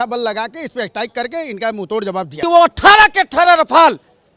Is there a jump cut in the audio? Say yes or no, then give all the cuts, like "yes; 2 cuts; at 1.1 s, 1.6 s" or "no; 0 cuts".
yes; 1 cut; at 2.4 s